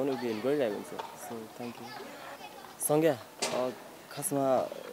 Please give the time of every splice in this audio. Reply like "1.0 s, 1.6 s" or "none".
2.4 s